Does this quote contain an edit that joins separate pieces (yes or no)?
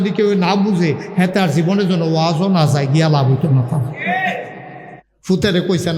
yes